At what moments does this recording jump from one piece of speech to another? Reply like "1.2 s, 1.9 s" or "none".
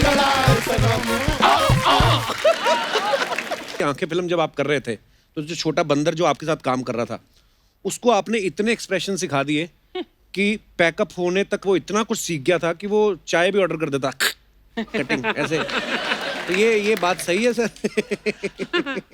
3.8 s